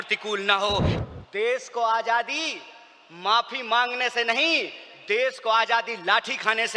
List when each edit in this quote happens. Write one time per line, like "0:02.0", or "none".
0:01.0